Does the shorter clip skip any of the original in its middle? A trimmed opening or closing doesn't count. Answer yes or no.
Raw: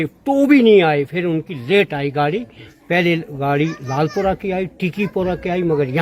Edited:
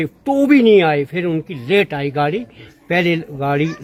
no